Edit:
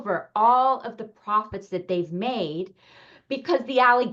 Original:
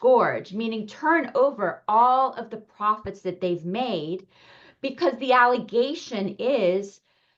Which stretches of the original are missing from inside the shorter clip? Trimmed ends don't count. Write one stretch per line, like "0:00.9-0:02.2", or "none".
none